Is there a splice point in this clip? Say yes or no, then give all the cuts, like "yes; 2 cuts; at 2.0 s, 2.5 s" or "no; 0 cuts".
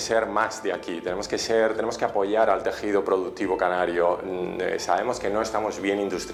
no; 0 cuts